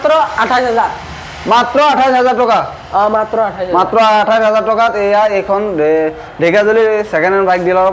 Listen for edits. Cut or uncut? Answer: uncut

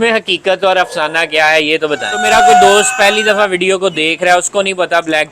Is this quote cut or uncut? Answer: cut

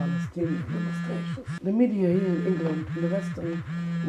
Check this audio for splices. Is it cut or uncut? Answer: cut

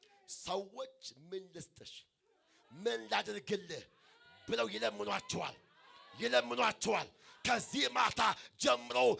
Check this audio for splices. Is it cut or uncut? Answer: uncut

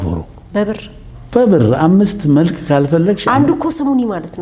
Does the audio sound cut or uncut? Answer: uncut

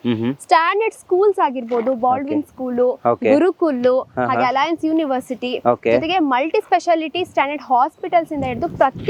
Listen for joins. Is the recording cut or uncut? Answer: uncut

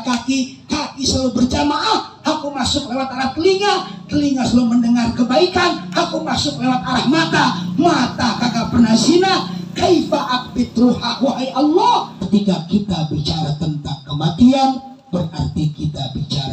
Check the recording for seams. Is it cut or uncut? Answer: cut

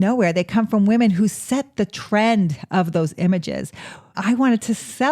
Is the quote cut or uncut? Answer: cut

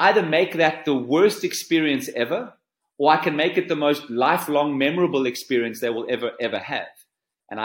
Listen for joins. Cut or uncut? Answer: uncut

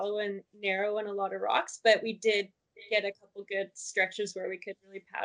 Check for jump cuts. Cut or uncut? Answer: uncut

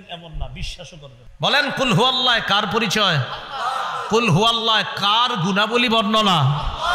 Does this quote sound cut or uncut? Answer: cut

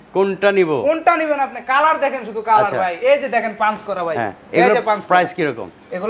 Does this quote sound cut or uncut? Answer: uncut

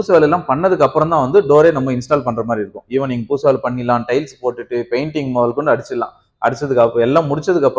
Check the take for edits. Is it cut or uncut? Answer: uncut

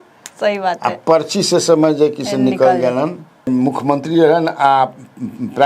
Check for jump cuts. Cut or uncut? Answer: cut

